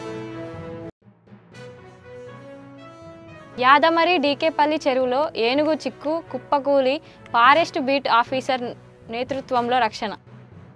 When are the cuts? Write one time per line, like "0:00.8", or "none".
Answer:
0:01.0
0:02.3